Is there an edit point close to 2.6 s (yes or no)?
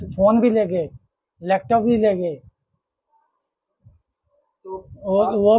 no